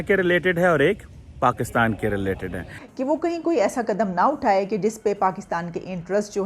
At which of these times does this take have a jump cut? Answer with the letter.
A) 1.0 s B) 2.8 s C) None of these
B